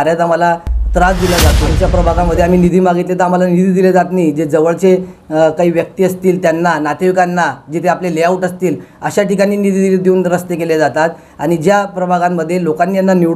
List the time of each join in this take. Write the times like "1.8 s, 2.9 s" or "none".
1.7 s